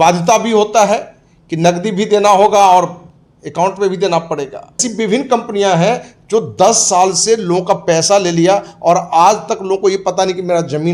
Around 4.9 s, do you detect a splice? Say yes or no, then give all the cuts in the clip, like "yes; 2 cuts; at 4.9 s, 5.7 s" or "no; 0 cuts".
yes; 1 cut; at 4.9 s